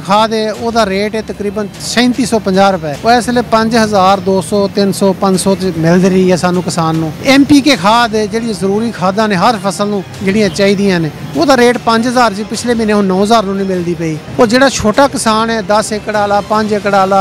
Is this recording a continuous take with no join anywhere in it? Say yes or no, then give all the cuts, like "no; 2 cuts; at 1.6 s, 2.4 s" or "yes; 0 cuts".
no; 6 cuts; at 1.8 s, 2.9 s, 7.1 s, 10.1 s, 11.2 s, 14.2 s